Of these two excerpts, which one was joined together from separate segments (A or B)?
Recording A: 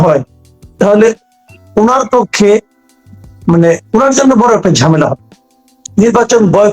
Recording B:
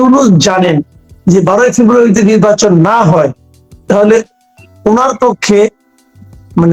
A